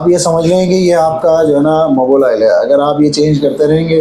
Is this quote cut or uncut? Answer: uncut